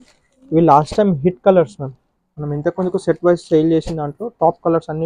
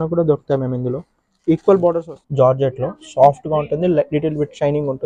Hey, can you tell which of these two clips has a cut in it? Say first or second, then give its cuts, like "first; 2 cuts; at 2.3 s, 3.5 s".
second; 1 cut; at 2.1 s